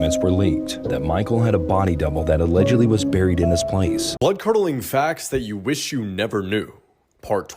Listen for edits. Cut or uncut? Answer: cut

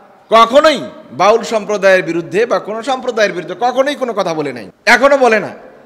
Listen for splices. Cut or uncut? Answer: cut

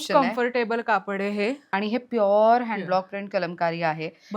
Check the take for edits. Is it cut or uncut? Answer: cut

